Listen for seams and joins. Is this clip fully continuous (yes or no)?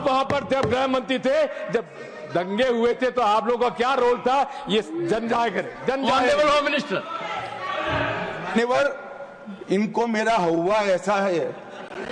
yes